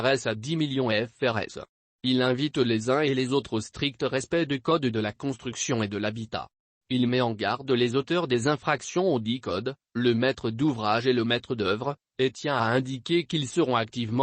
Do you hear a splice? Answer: yes; 1 cut; at 2.1 s

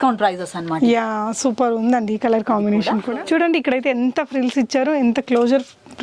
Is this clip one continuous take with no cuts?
no; 1 cut; at 3.0 s

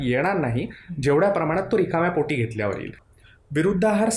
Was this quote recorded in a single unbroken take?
no; 1 cut; at 3.0 s

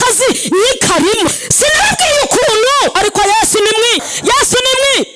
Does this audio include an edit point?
yes; 3 cuts; at 1.3 s, 2.9 s, 4.1 s

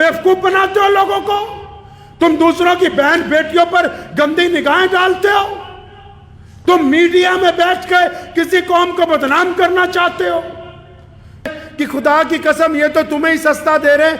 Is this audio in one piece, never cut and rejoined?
no; 1 cut; at 11.6 s

